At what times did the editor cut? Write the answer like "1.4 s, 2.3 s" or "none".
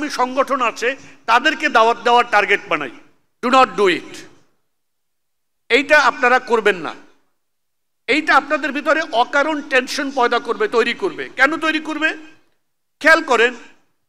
none